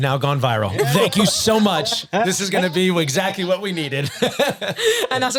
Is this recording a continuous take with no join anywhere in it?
yes; 0 cuts

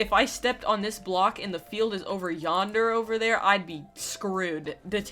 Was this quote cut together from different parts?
no; 0 cuts

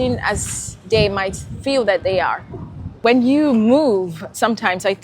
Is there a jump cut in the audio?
yes; 1 cut; at 3.0 s

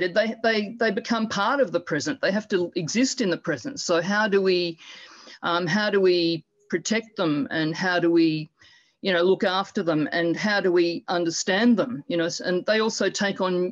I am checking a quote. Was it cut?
no; 0 cuts

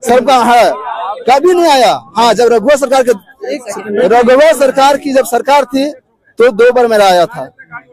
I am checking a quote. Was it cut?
no; 0 cuts

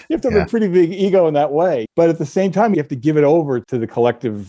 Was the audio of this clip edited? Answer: yes; 3 cuts; at 1.9 s, 2.7 s, 3.6 s

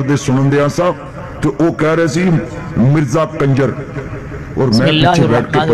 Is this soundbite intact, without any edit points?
yes; 0 cuts

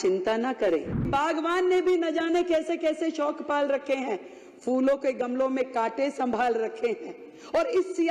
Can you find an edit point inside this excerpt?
yes; 1 cut; at 1.1 s

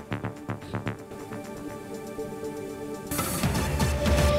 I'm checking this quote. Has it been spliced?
yes; 1 cut; at 1.3 s

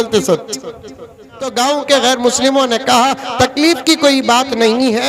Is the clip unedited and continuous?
no; 1 cut; at 1.5 s

